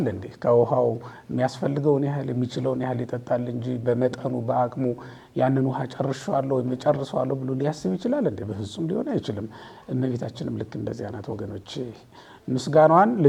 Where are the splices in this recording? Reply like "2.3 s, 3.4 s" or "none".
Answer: none